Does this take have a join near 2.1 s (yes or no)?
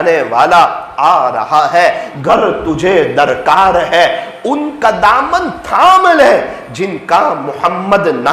yes